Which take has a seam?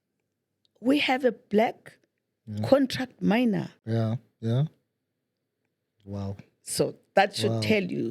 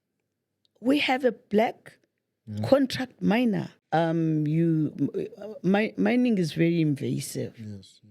second; 1 cut; at 3.7 s

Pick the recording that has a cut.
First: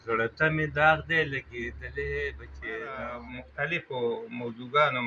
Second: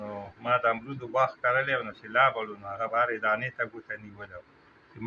first; 1 cut; at 3.4 s

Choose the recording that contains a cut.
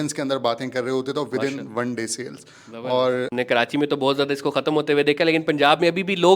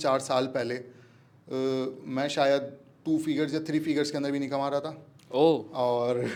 first; 1 cut; at 3.3 s

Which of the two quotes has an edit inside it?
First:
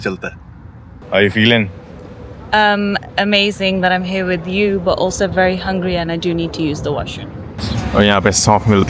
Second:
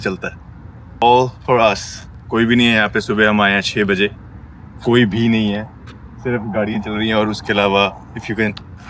first; 2 cuts; at 1.0 s, 7.5 s

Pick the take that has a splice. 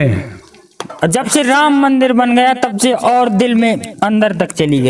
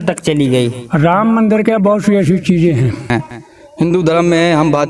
second; 1 cut; at 3.1 s

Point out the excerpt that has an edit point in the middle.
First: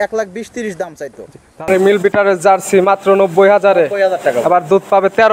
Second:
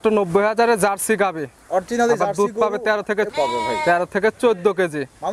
first; 1 cut; at 1.7 s

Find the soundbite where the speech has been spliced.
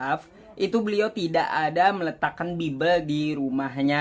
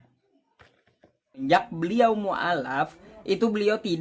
second; 1 cut; at 1.4 s

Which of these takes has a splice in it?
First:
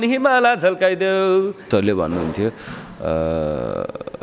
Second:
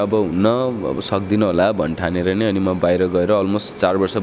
first; 1 cut; at 1.7 s

